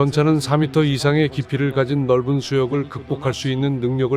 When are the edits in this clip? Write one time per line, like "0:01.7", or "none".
none